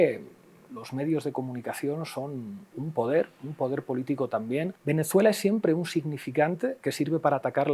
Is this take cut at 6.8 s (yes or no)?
no